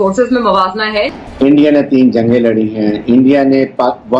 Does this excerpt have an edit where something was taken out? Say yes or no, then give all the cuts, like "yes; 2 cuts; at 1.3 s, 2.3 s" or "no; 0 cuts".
yes; 1 cut; at 1.1 s